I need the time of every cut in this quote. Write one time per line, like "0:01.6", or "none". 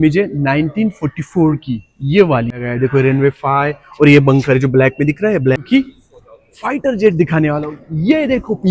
0:02.5
0:05.6